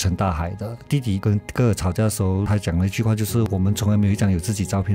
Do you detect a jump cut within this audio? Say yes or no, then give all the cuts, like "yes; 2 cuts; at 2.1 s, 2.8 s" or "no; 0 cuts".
yes; 3 cuts; at 0.9 s, 2.4 s, 3.5 s